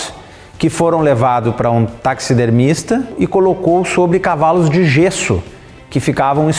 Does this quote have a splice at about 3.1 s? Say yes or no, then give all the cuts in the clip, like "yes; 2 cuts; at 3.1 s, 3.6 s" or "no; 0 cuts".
yes; 1 cut; at 3.1 s